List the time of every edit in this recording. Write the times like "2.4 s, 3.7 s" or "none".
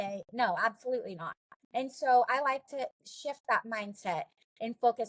3.1 s

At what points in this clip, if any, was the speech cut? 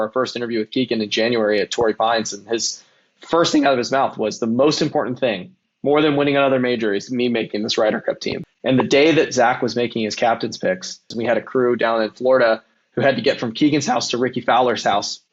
8.4 s, 11.1 s

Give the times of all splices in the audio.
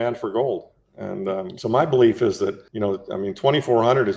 1.5 s, 2.6 s

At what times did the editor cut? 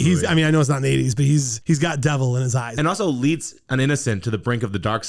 2.6 s

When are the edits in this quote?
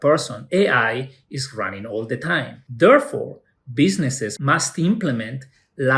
2.6 s, 4.3 s

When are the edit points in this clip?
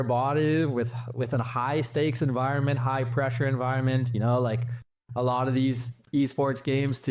none

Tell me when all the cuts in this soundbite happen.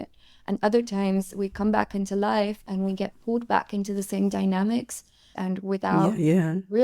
5.3 s

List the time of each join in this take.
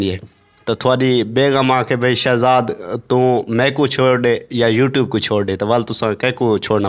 none

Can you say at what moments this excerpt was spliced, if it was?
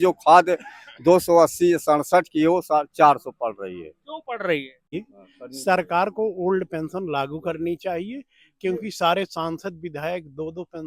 4.8 s

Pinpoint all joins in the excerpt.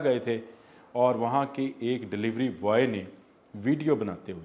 none

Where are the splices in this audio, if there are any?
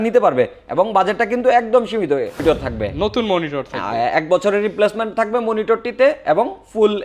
2.4 s

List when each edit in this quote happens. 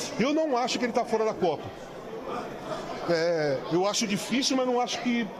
none

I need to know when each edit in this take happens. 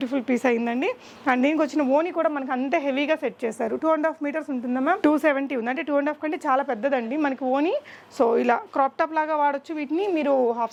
none

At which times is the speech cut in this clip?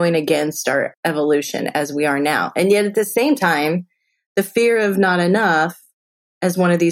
0.9 s

